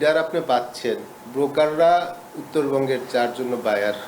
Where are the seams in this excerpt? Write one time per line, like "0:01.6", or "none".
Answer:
0:01.2